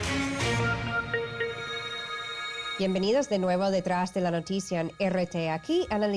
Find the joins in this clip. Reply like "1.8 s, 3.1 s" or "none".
none

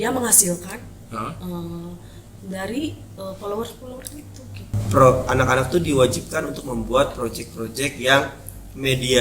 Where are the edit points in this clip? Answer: 4.7 s

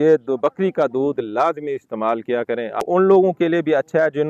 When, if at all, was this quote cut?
2.8 s

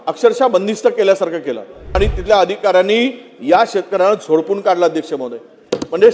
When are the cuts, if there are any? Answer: 1.9 s

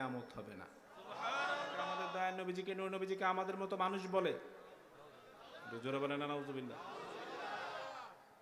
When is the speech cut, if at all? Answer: 2.0 s

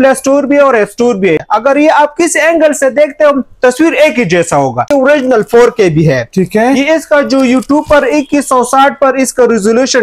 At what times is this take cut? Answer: 1.4 s, 4.9 s

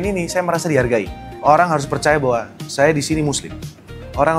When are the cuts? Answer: 1.2 s

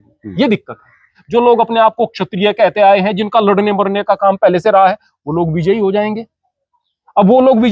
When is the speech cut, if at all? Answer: 1.2 s

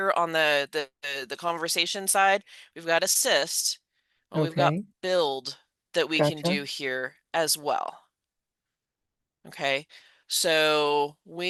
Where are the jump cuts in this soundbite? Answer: none

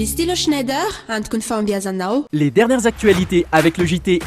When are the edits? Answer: 2.3 s

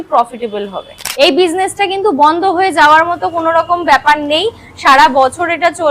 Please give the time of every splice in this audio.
0.9 s

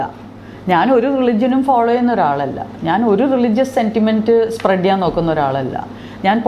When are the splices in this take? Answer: none

